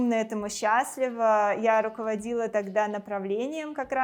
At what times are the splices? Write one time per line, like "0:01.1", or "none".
none

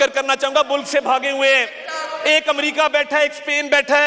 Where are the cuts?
none

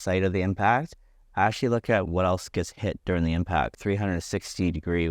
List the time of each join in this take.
0:03.7

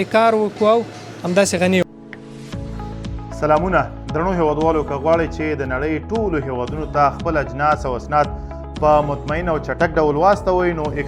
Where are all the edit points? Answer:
0:01.8

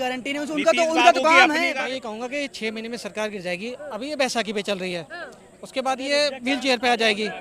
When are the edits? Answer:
0:01.7

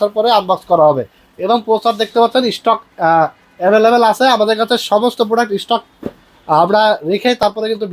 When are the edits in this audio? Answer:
none

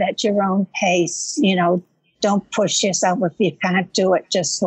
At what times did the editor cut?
none

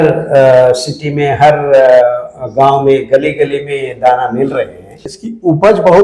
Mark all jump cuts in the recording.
0:04.9

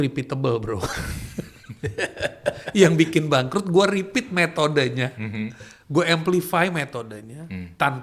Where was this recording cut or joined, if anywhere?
none

